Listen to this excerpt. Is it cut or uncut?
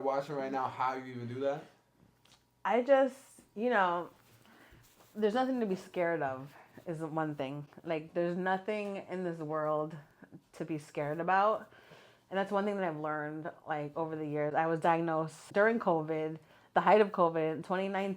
uncut